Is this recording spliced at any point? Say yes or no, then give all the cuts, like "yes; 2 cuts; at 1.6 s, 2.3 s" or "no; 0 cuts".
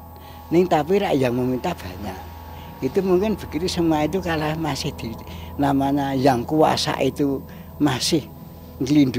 no; 0 cuts